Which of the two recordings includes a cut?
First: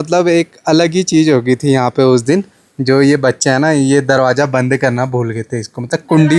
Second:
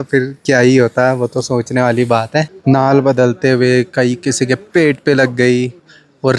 second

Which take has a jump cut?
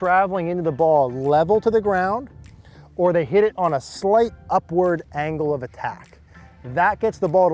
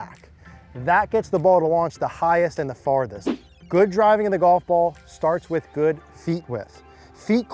second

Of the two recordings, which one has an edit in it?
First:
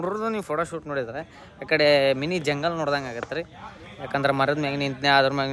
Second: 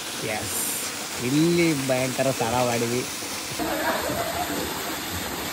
second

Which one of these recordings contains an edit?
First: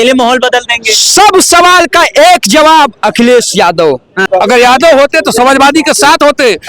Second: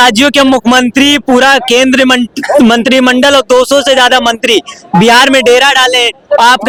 first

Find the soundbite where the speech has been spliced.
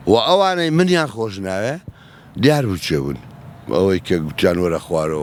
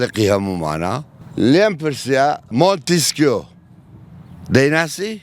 second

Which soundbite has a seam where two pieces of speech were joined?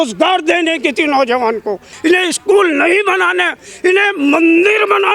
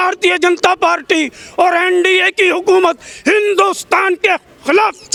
first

